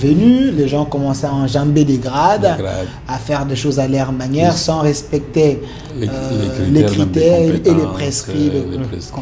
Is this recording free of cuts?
yes; 0 cuts

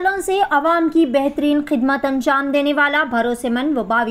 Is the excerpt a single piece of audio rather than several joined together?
yes; 0 cuts

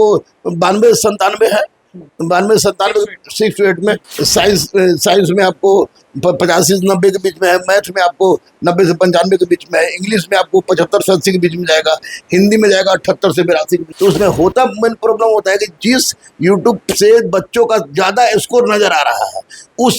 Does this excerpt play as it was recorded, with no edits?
no; 2 cuts; at 4.1 s, 13.9 s

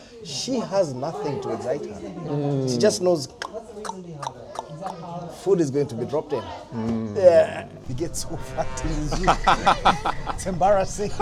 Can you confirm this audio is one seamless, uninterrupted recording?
yes; 0 cuts

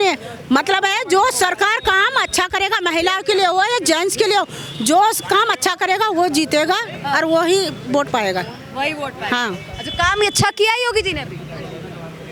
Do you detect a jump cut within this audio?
no; 0 cuts

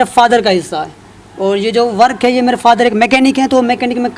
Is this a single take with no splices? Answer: yes; 0 cuts

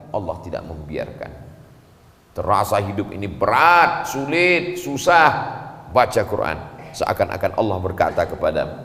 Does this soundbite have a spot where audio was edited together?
no; 0 cuts

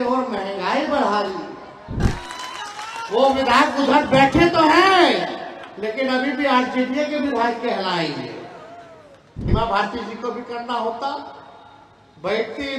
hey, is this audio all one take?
no; 2 cuts; at 2.0 s, 9.5 s

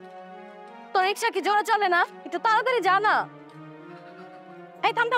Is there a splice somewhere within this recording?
yes; 1 cut; at 0.9 s

